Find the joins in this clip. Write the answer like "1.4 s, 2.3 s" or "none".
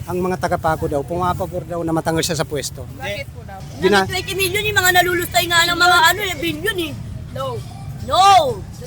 3.6 s